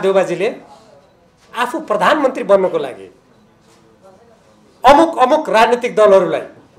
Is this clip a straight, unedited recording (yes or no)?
yes